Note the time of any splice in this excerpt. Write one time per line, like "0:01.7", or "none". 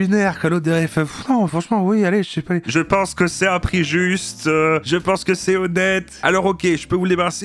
0:02.6
0:06.1